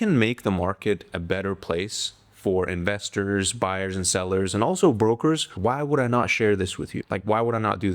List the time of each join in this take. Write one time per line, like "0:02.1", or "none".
0:05.5
0:06.9